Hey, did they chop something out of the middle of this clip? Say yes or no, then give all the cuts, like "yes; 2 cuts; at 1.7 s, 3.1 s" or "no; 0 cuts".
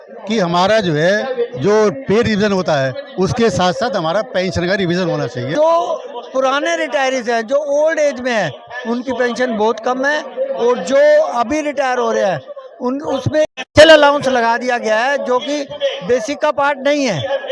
yes; 1 cut; at 5.5 s